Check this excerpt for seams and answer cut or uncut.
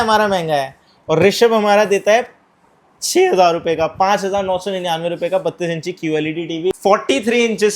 cut